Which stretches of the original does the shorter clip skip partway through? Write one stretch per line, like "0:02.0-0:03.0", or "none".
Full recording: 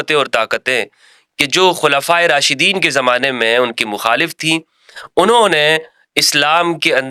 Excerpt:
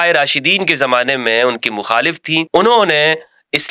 0:04.6-0:05.1